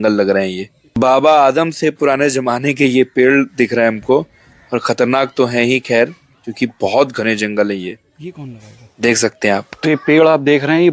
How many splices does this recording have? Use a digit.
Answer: 0